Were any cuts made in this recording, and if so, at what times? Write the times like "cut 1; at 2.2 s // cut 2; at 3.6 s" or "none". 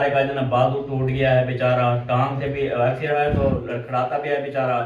cut 1; at 3.2 s